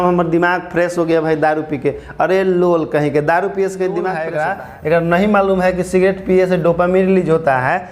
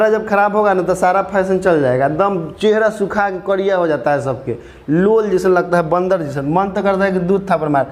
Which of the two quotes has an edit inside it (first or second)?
first